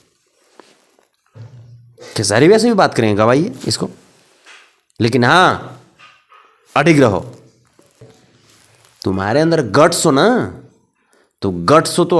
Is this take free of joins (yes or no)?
no